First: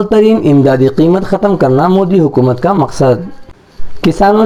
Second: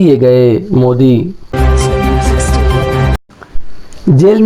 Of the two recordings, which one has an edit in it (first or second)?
second